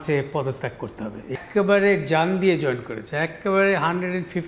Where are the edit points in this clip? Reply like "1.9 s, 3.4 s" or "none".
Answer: 1.4 s